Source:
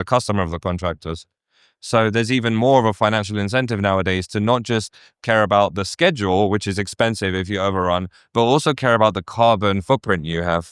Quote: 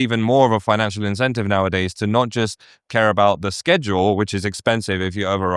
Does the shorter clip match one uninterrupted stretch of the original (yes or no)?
yes